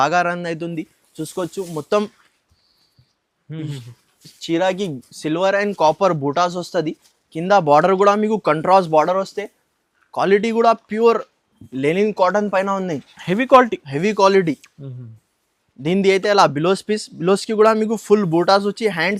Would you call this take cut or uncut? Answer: uncut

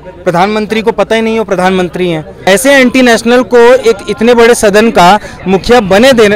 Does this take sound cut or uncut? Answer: cut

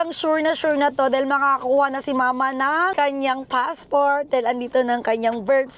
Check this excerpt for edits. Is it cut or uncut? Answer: cut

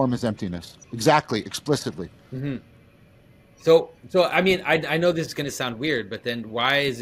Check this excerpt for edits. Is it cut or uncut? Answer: uncut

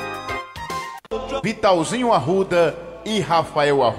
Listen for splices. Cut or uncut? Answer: uncut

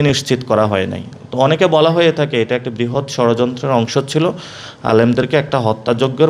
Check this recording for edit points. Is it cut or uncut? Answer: uncut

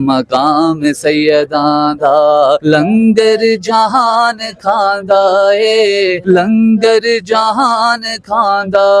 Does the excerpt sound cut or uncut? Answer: cut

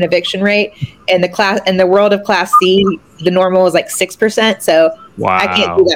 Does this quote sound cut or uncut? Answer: uncut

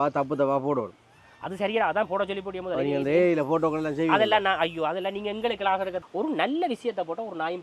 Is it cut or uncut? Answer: cut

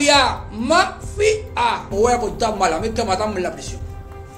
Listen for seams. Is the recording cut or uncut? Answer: cut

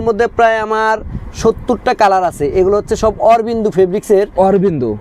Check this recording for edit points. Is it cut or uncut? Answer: uncut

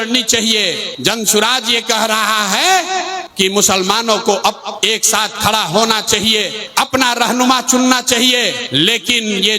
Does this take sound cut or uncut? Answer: cut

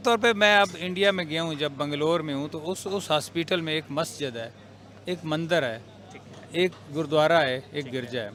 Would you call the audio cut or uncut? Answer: uncut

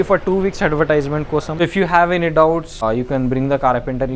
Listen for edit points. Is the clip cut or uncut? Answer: cut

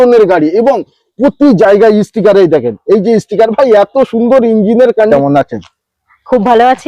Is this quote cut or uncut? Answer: cut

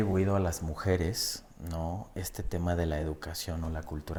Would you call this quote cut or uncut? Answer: uncut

